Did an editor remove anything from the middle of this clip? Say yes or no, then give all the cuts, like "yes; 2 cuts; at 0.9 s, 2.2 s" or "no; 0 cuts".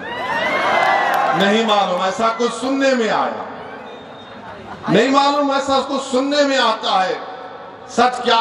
no; 0 cuts